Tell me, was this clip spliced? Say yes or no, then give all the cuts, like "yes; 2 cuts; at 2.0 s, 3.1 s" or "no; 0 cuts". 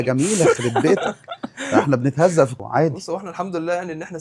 yes; 1 cut; at 2.6 s